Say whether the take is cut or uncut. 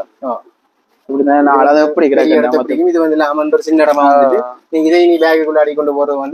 uncut